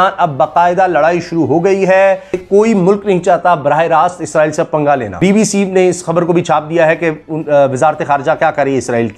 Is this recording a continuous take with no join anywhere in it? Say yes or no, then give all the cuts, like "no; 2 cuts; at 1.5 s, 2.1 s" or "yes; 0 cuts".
no; 2 cuts; at 2.4 s, 5.1 s